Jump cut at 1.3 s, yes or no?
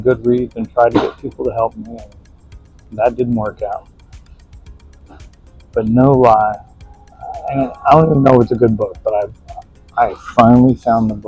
no